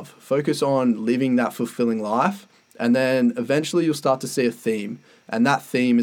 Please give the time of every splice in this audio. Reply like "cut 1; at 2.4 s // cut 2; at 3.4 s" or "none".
none